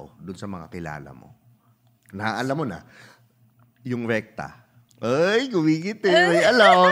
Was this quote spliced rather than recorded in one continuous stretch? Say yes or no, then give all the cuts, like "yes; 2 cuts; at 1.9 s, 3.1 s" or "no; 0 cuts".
no; 0 cuts